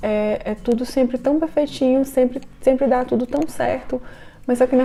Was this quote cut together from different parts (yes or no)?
no